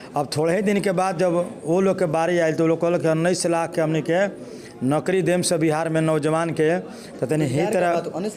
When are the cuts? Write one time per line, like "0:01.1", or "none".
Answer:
none